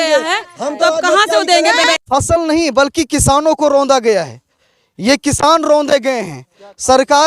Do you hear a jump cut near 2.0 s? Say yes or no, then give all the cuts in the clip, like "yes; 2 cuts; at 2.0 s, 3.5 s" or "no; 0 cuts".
yes; 1 cut; at 2.0 s